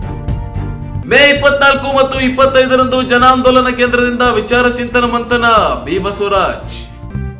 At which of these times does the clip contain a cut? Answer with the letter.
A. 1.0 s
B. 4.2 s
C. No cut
A